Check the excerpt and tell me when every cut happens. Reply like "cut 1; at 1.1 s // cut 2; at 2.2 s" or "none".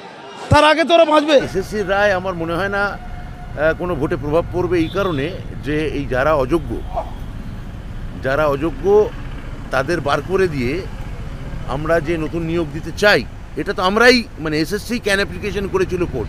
cut 1; at 1.5 s

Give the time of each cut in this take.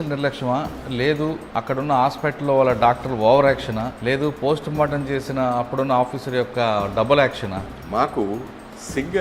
cut 1; at 1.4 s // cut 2; at 3.9 s // cut 3; at 7.7 s

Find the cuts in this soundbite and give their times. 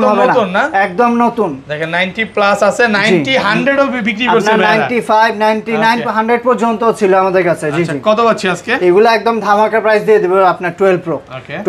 none

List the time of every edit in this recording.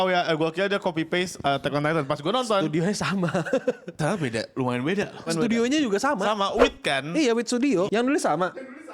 cut 1; at 5.3 s // cut 2; at 7.9 s

